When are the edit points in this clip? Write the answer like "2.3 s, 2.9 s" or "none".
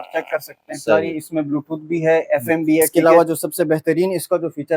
0.9 s, 2.9 s